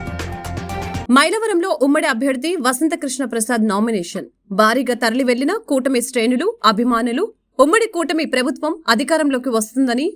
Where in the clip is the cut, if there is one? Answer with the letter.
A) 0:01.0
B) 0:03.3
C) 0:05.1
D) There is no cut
A